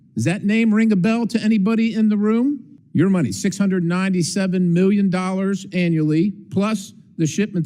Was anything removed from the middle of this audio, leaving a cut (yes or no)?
yes